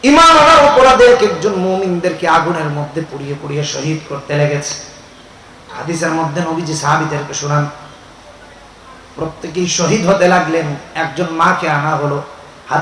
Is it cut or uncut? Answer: uncut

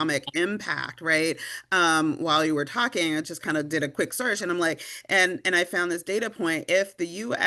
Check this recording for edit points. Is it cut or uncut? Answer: uncut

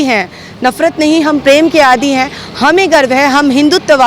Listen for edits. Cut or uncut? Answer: uncut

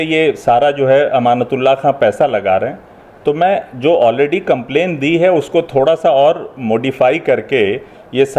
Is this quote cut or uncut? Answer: uncut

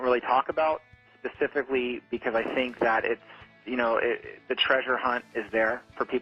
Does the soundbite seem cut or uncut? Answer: uncut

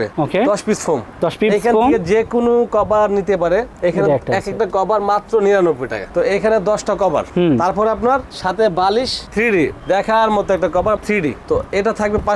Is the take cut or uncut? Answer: uncut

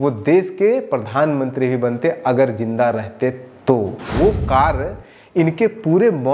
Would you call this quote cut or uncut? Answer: cut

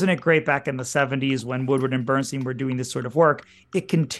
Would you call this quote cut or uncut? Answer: uncut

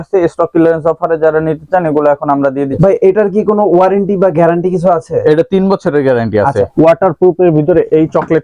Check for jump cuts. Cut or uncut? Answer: cut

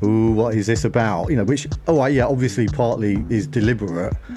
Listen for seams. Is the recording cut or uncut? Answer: uncut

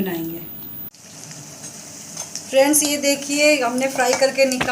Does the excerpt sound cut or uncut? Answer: cut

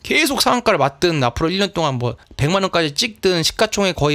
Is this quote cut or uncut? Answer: cut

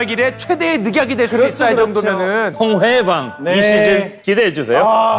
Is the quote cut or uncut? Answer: uncut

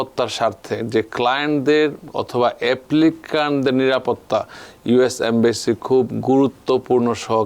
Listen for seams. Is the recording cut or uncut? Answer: uncut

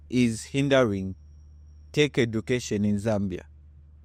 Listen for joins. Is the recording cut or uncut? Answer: uncut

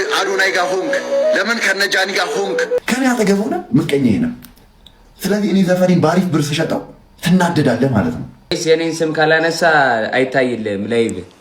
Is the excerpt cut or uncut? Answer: cut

